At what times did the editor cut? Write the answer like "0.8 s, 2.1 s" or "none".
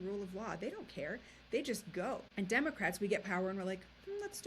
2.3 s